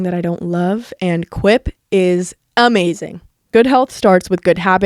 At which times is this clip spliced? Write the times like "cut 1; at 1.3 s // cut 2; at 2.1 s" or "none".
none